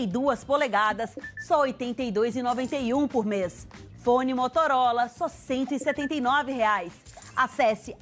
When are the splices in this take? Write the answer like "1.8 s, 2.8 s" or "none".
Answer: none